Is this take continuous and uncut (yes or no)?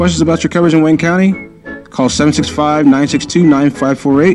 yes